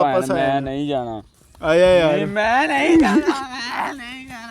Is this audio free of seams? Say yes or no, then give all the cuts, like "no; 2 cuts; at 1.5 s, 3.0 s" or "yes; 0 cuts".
yes; 0 cuts